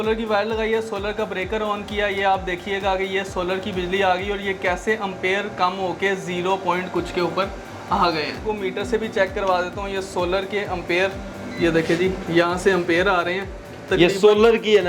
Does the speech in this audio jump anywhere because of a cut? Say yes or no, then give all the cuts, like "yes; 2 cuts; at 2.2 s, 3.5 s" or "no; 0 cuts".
yes; 1 cut; at 8.4 s